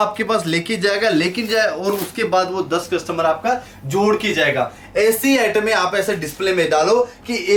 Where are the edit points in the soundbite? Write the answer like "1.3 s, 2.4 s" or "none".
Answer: none